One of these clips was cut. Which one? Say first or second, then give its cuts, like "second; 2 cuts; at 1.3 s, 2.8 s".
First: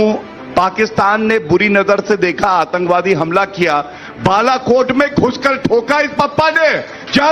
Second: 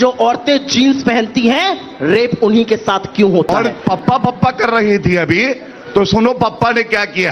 second; 1 cut; at 3.5 s